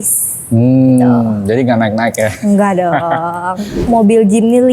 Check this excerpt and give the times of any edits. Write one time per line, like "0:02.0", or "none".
0:03.8